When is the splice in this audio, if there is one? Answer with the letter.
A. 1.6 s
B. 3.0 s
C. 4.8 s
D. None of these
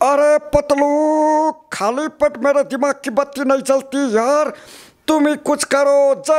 D